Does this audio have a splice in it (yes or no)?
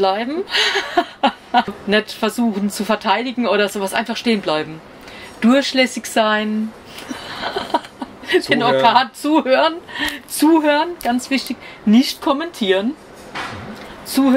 yes